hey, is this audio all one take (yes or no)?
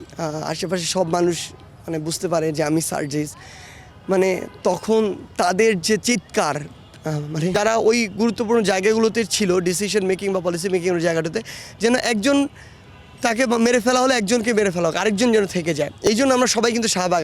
no